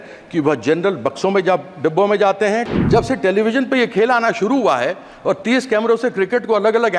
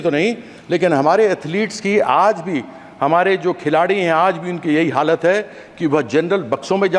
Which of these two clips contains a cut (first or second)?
first